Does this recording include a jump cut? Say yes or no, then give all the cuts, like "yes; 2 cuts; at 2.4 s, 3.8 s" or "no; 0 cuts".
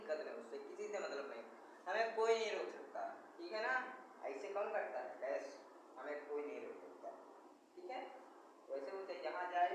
no; 0 cuts